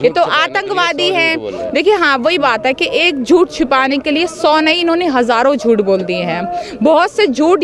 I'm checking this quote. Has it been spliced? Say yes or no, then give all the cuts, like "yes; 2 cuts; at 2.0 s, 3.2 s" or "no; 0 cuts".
no; 0 cuts